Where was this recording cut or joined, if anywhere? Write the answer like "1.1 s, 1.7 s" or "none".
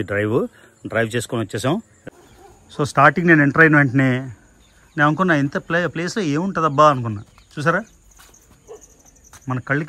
2.0 s